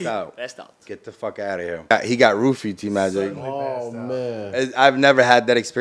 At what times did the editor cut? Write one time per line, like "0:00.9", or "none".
0:01.9

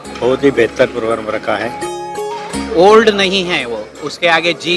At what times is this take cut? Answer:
0:02.3

